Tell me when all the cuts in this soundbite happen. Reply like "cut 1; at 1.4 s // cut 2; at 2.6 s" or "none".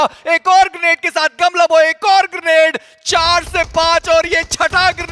none